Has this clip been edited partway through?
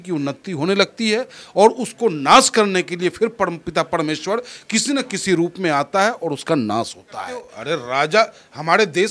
yes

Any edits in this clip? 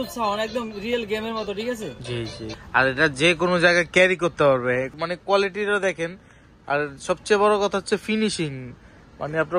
yes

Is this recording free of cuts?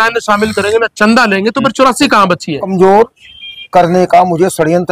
no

